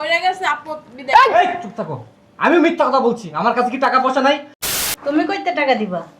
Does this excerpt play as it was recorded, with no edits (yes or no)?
no